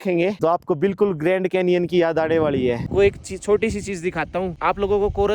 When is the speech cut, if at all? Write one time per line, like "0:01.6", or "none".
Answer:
0:02.9